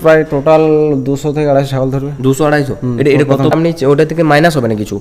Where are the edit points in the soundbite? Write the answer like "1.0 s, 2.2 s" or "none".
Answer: 3.5 s